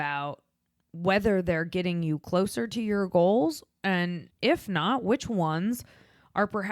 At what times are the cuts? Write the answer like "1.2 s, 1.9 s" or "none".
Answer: 4.2 s